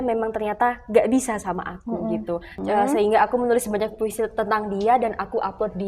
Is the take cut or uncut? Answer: cut